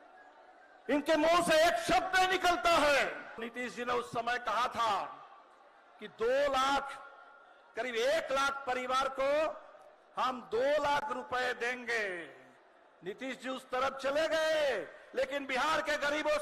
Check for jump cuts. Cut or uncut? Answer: cut